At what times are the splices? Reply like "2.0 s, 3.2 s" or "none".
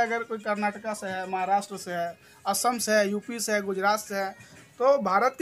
none